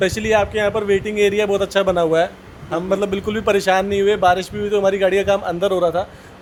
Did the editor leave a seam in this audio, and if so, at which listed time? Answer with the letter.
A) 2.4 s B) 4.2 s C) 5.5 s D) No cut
D